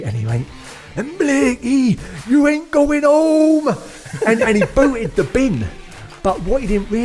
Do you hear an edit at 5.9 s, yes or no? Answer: no